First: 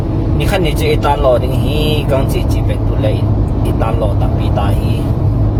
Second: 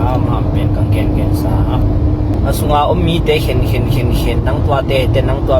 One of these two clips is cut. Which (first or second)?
second